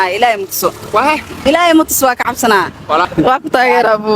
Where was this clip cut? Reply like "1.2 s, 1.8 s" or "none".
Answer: 3.1 s